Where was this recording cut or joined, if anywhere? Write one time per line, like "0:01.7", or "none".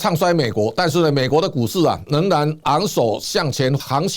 0:02.0